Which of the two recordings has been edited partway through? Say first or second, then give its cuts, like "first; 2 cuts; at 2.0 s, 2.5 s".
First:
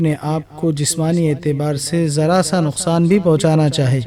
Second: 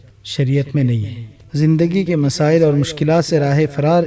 second; 1 cut; at 1.4 s